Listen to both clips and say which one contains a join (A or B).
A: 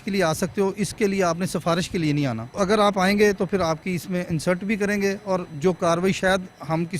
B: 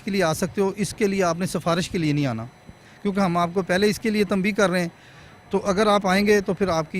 A